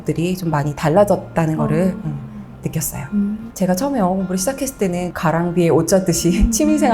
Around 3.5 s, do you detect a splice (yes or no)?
yes